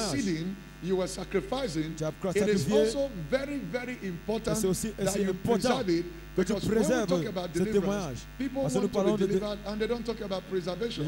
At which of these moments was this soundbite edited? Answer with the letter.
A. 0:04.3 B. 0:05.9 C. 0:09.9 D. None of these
D